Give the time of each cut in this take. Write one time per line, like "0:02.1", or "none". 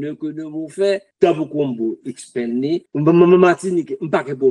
0:01.1
0:02.9